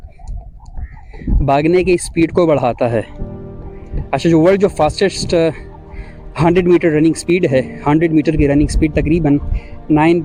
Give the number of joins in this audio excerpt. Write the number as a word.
zero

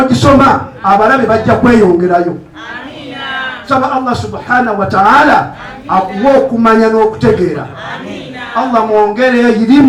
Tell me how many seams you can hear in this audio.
zero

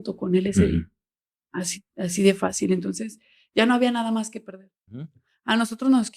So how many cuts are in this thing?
one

